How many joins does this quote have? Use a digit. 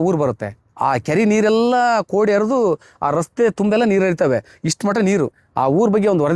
1